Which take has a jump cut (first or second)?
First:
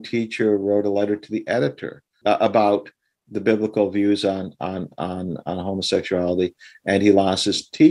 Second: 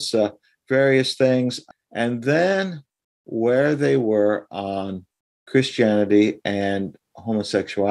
second